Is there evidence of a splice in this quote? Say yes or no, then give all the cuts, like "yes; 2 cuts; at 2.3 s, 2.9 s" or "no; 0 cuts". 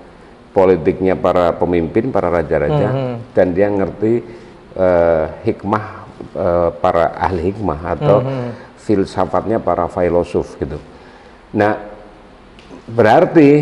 no; 0 cuts